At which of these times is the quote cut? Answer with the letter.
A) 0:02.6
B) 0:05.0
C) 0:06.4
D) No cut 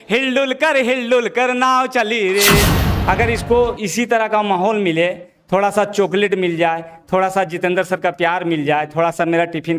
A